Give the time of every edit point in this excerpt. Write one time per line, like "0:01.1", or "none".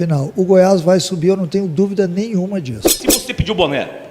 0:03.0

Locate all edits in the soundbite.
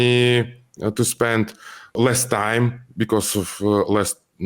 0:01.9

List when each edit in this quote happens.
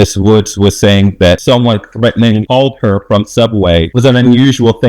0:01.4
0:03.9

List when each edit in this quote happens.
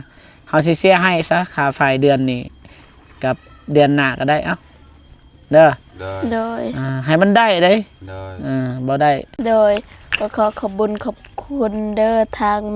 0:09.3

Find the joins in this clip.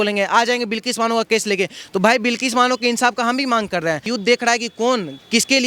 0:04.1

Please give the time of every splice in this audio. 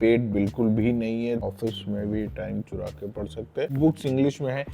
0:01.4
0:03.7

